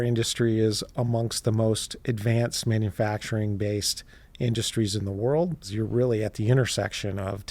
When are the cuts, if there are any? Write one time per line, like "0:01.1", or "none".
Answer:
0:05.7